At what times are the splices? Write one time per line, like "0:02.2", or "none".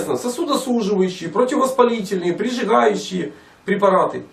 0:01.9